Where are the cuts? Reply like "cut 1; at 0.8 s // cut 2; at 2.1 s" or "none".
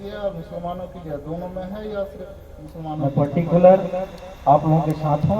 cut 1; at 3.0 s